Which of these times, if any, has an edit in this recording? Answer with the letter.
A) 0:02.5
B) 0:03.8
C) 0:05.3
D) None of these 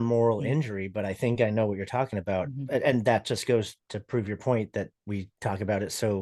C